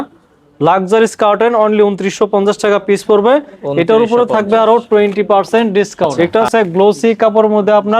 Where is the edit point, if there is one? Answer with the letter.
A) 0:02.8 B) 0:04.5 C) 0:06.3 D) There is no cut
C